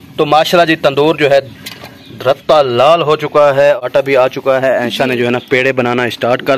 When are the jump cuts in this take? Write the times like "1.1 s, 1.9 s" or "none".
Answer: 3.8 s